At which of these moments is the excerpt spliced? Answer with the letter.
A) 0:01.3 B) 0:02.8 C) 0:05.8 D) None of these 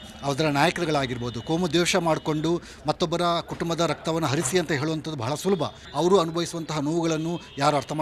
C